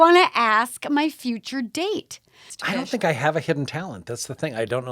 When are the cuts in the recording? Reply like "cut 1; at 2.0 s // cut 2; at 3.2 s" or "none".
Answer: cut 1; at 2.5 s